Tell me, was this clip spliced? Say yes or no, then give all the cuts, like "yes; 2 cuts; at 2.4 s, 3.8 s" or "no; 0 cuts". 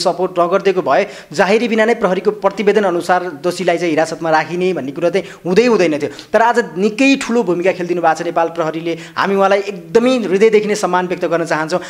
no; 0 cuts